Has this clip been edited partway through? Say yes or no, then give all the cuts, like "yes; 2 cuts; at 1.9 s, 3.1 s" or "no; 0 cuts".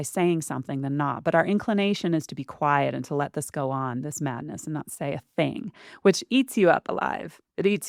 no; 0 cuts